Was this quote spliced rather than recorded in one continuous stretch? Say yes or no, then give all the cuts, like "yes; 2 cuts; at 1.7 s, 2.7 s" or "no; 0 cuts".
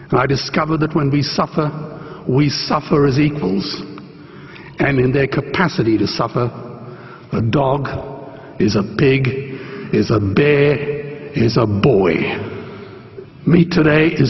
no; 0 cuts